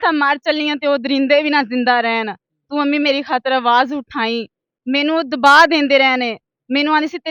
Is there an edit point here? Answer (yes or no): no